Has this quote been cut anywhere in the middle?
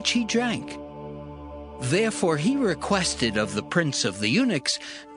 no; 0 cuts

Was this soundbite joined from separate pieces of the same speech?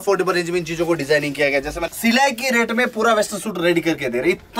yes; 1 cut; at 1.8 s

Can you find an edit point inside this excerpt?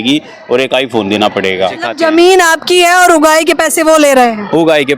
yes; 1 cut; at 1.8 s

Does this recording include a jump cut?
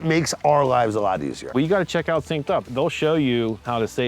yes; 2 cuts; at 1.5 s, 2.7 s

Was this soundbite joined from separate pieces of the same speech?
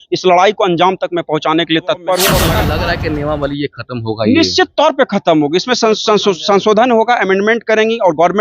yes; 1 cut; at 2.5 s

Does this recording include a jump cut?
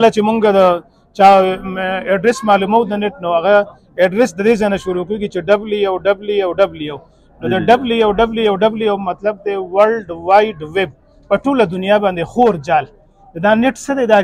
no; 0 cuts

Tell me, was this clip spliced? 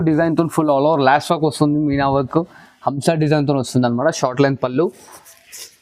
no; 0 cuts

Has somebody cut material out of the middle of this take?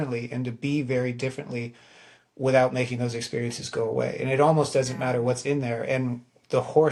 no; 0 cuts

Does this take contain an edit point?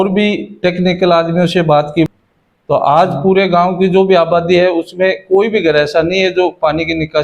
yes; 1 cut; at 2.1 s

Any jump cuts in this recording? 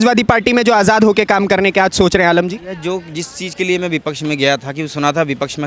no; 0 cuts

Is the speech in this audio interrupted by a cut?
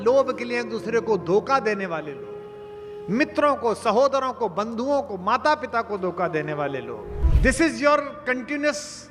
yes; 1 cut; at 7.2 s

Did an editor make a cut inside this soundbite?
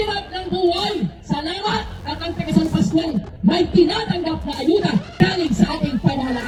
no; 0 cuts

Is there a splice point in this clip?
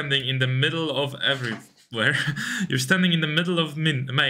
no; 0 cuts

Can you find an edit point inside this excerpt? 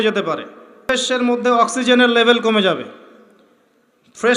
yes; 1 cut; at 0.9 s

